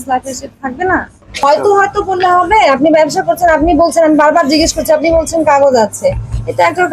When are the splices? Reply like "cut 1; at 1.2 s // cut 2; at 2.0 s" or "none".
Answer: cut 1; at 1.2 s